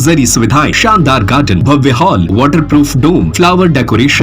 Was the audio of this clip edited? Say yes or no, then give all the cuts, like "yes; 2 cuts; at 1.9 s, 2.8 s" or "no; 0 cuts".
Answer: yes; 4 cuts; at 0.8 s, 1.6 s, 2.3 s, 3.3 s